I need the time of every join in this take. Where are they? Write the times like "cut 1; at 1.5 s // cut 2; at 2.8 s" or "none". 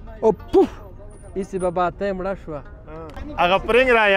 cut 1; at 3.2 s